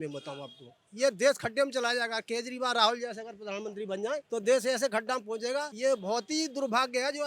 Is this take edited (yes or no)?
yes